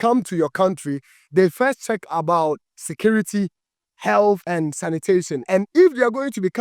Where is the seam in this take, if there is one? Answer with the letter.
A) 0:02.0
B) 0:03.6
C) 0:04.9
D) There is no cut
C